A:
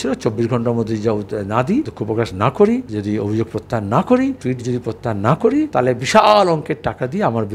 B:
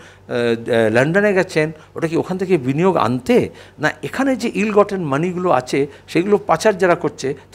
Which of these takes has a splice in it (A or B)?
A